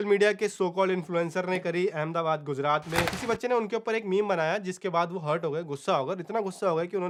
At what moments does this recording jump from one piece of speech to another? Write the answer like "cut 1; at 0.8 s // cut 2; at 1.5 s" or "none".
none